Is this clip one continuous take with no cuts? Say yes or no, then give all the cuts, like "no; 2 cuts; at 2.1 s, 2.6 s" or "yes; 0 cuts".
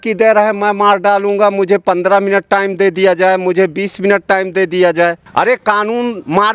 yes; 0 cuts